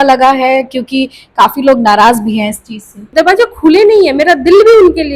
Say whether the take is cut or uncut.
cut